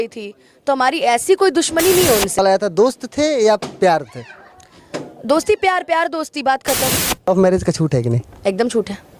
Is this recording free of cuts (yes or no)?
no